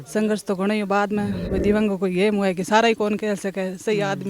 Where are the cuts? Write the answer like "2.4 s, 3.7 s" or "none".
1.5 s